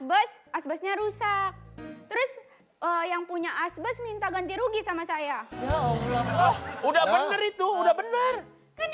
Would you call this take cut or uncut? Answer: uncut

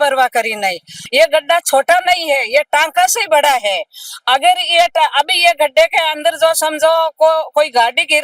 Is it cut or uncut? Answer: uncut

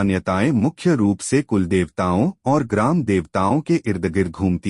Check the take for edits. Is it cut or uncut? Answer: uncut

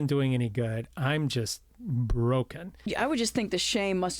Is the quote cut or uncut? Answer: cut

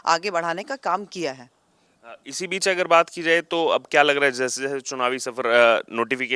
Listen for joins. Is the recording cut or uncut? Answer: uncut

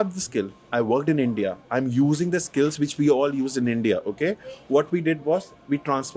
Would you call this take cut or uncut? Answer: uncut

